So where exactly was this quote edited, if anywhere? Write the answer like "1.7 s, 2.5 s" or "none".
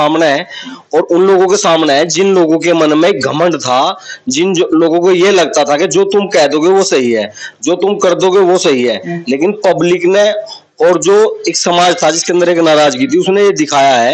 none